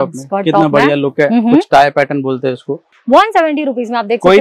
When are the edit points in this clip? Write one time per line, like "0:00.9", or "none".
0:02.9